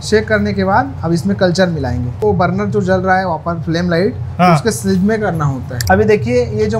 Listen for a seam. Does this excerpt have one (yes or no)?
yes